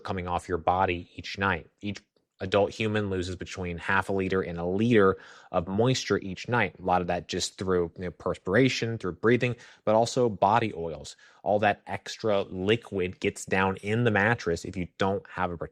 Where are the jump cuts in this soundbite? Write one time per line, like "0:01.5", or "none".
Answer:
none